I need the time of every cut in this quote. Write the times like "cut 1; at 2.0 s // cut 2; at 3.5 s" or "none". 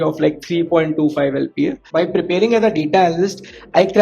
cut 1; at 1.8 s

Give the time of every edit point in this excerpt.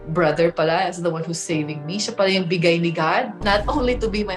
none

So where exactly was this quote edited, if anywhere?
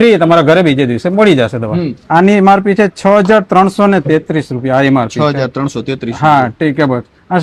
cut 1; at 1.9 s

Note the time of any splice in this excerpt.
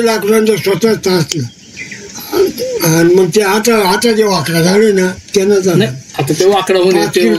none

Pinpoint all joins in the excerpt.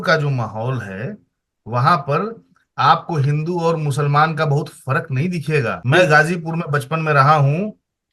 cut 1; at 5.8 s

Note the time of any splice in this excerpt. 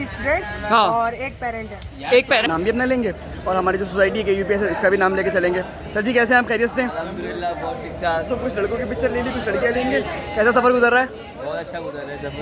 cut 1; at 2.4 s

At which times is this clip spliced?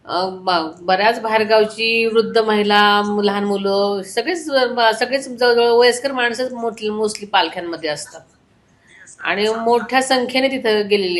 none

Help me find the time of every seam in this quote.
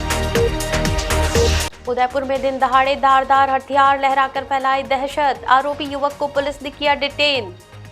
cut 1; at 1.6 s

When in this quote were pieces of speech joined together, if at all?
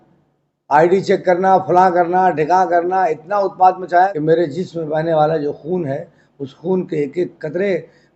cut 1; at 4.1 s

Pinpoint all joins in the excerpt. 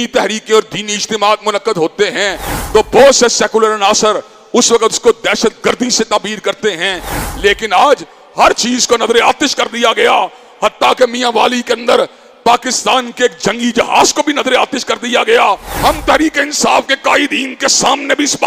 cut 1; at 15.7 s

